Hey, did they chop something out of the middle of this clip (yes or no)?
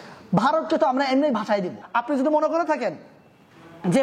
yes